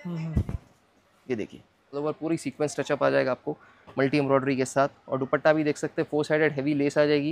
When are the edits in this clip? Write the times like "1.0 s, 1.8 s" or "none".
2.0 s